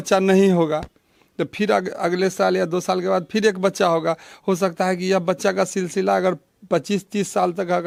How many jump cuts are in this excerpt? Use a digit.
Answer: 0